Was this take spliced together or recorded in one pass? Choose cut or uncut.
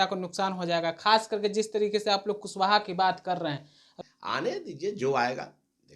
cut